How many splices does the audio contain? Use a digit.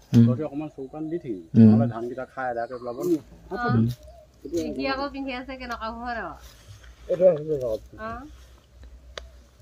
1